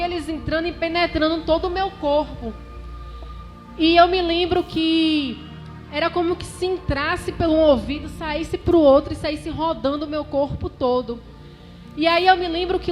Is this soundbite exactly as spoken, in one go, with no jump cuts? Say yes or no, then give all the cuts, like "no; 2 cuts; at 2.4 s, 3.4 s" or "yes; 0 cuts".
yes; 0 cuts